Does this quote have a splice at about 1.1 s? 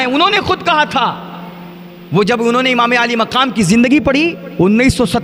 no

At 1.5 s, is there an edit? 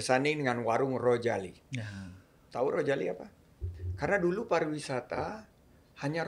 no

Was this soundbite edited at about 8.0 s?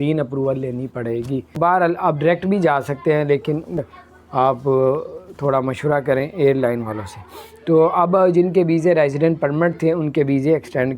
no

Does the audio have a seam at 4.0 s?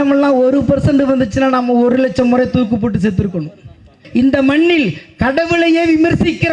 yes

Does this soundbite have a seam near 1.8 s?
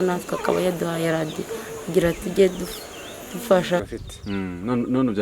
no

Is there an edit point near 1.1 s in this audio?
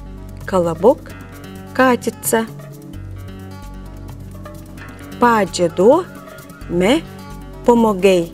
no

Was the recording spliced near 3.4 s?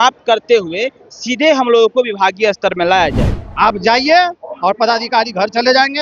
yes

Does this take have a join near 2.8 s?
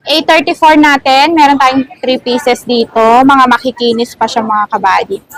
no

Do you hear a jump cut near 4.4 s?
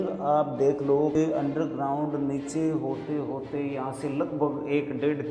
no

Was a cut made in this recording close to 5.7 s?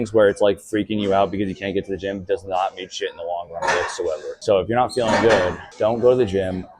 no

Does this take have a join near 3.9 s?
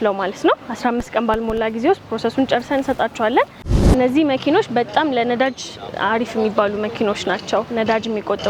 yes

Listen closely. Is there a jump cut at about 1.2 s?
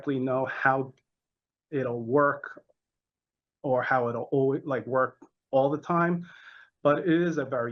no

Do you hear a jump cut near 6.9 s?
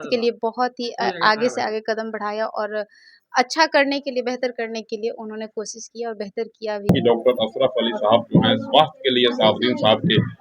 yes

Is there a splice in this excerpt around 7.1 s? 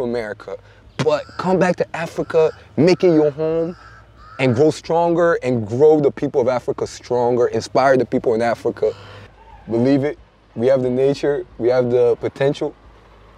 no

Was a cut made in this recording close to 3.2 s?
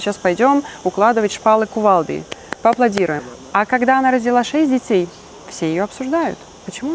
yes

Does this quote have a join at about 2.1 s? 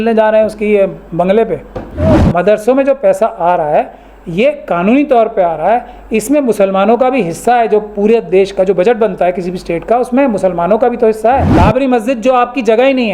yes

